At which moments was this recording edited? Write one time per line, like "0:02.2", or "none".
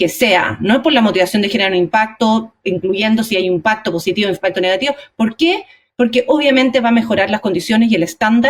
none